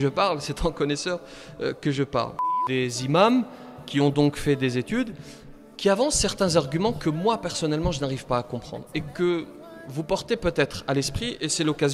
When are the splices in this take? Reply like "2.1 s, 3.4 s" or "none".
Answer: 2.5 s